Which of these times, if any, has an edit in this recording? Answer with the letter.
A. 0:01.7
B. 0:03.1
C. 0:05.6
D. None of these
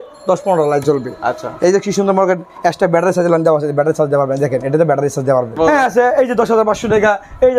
C